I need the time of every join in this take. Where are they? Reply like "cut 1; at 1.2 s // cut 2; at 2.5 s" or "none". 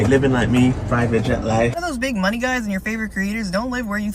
cut 1; at 1.8 s